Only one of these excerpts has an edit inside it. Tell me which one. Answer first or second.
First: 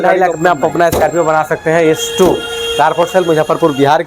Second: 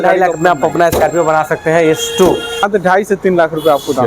second